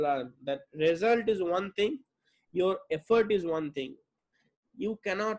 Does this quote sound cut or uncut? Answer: uncut